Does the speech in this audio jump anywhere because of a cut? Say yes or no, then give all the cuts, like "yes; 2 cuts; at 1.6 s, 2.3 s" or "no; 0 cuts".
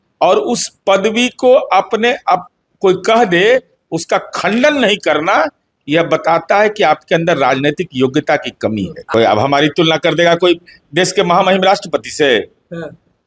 yes; 1 cut; at 9.0 s